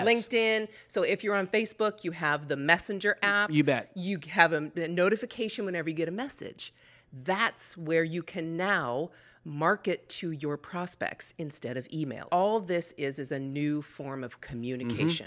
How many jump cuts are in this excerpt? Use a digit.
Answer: 1